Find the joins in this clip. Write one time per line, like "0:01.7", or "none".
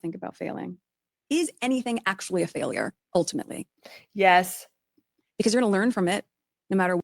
0:01.1